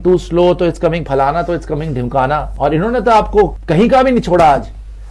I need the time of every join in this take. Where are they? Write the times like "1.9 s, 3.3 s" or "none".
2.5 s, 3.6 s